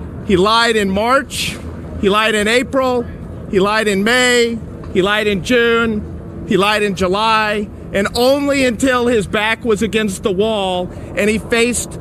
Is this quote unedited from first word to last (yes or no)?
yes